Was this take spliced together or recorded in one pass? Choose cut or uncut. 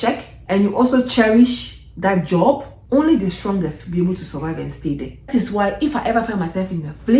cut